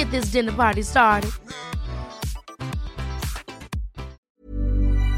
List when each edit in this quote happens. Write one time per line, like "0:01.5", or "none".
0:04.2